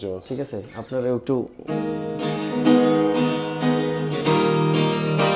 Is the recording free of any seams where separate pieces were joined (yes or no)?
yes